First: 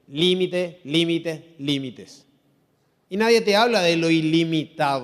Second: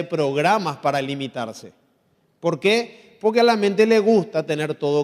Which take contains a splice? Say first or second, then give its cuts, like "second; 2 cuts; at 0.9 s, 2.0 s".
second; 1 cut; at 1.2 s